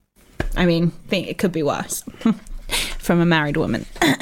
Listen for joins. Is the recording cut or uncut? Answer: uncut